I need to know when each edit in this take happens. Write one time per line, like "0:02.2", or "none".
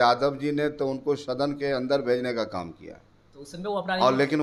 none